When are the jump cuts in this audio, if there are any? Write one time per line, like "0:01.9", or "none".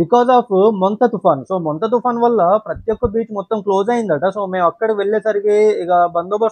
none